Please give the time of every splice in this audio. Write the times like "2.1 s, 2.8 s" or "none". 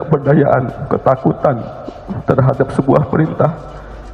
none